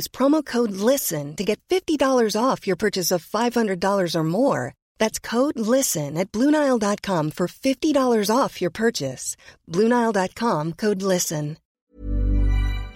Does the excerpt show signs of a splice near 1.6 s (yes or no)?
no